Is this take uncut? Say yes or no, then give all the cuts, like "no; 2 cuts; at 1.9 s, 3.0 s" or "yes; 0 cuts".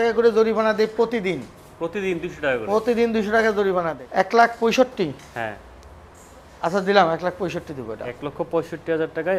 no; 1 cut; at 3.9 s